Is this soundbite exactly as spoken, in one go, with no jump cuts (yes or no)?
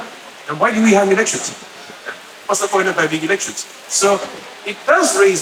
yes